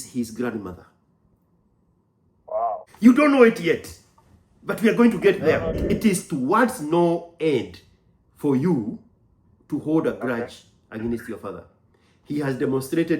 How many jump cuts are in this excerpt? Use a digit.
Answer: 2